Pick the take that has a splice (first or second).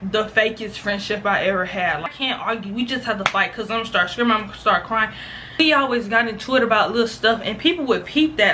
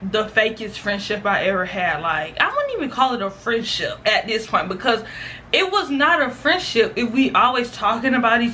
first